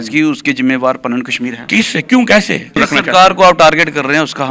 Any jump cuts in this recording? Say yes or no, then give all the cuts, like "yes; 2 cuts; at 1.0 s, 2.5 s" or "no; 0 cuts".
yes; 1 cut; at 2.8 s